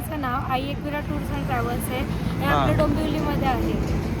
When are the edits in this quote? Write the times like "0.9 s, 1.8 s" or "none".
none